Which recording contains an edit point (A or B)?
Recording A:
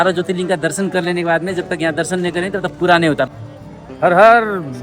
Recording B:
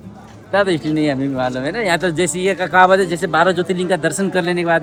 A